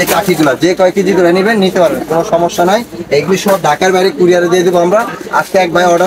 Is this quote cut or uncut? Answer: uncut